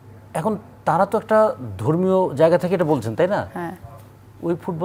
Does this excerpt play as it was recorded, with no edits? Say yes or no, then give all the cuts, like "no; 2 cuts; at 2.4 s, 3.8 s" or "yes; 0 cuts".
yes; 0 cuts